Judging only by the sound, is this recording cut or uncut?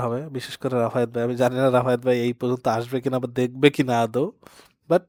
uncut